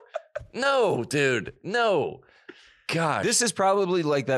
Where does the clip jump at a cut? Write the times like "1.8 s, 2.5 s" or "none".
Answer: none